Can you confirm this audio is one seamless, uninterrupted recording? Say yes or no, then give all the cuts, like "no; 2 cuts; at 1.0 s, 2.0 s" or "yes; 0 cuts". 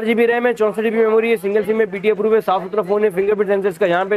yes; 0 cuts